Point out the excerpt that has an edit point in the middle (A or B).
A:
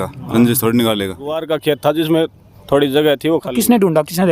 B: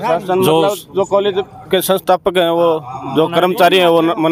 A